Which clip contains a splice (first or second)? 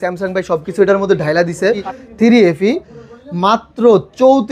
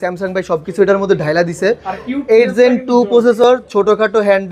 first